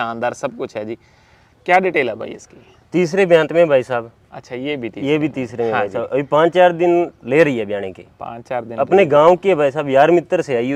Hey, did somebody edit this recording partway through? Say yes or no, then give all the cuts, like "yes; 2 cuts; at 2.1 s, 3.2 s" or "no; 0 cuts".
no; 0 cuts